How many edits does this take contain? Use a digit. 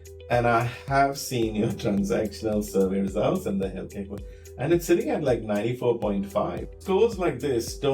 1